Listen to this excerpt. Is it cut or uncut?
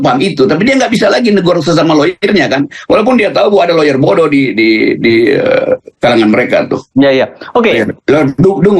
cut